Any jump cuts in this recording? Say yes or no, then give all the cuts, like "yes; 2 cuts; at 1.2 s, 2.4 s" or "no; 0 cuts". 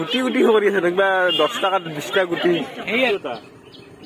yes; 1 cut; at 3.1 s